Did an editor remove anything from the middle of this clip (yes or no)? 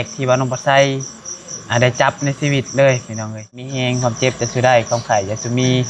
yes